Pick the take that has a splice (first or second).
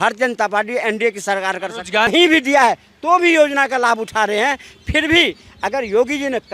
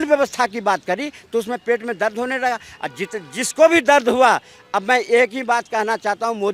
first